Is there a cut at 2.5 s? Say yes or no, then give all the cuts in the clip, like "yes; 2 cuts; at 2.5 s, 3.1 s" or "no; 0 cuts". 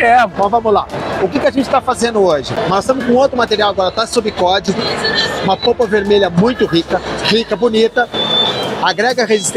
yes; 1 cut; at 2.5 s